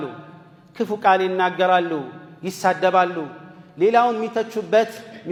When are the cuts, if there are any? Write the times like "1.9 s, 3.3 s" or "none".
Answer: none